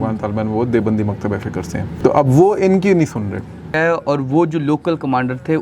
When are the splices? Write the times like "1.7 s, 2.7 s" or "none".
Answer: 1.9 s, 3.8 s